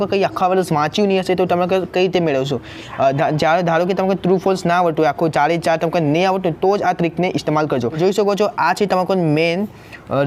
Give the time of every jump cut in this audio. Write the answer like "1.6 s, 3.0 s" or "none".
2.8 s, 7.9 s